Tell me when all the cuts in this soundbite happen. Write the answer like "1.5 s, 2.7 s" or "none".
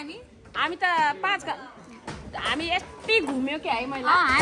none